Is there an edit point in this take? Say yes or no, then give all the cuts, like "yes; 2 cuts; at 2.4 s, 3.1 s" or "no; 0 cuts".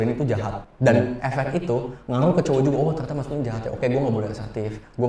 no; 0 cuts